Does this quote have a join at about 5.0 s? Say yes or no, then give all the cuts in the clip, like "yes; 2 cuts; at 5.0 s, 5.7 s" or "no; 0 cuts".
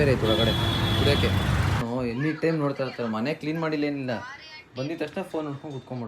no; 1 cut; at 1.8 s